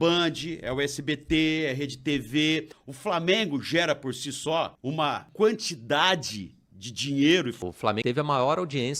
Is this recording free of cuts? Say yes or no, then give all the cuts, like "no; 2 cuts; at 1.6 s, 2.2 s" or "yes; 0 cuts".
no; 3 cuts; at 2.8 s, 5.2 s, 7.7 s